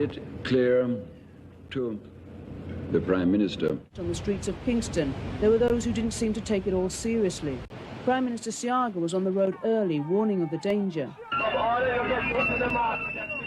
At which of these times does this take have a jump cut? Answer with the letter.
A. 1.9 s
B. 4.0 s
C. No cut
B